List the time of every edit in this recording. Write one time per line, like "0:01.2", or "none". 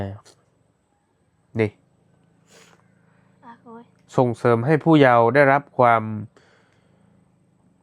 none